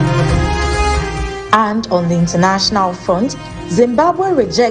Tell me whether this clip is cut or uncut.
cut